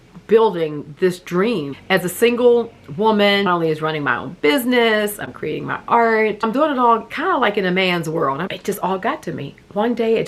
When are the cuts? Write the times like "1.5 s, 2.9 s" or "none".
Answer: 1.7 s, 3.5 s, 6.4 s, 8.4 s